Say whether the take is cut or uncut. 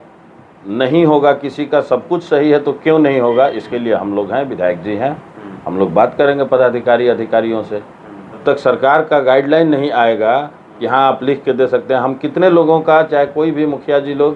cut